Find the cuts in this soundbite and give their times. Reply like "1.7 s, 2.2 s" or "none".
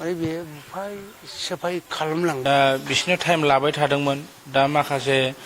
2.4 s

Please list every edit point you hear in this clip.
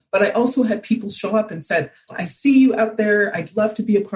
2.1 s

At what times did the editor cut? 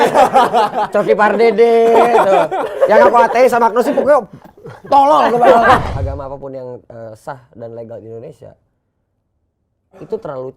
5.8 s

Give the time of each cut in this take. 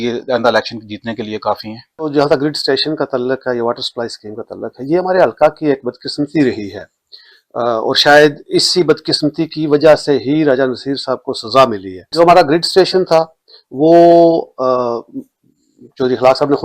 none

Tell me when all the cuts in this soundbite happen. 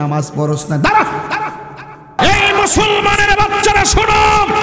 2.2 s

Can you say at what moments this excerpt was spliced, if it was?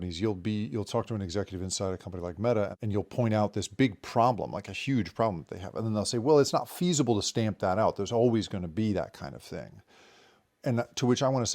2.8 s

